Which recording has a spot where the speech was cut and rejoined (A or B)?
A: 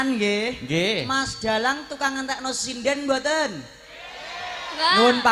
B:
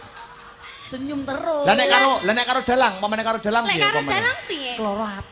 B